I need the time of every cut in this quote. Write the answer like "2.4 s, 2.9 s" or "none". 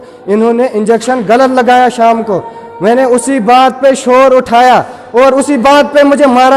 none